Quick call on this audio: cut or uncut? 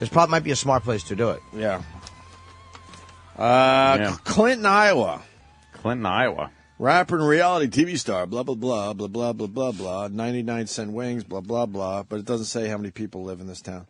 cut